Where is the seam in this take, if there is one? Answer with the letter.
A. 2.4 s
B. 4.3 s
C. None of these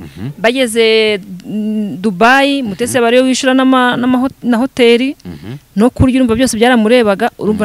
C